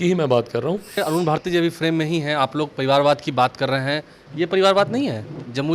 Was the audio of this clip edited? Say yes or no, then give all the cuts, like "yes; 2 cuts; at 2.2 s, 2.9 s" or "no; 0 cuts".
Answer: yes; 1 cut; at 1.0 s